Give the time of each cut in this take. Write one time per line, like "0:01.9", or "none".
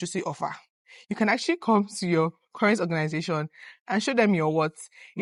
none